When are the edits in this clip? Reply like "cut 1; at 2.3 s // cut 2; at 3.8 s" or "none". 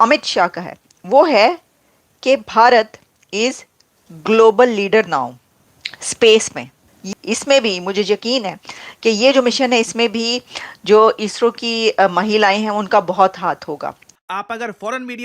cut 1; at 7.0 s // cut 2; at 14.1 s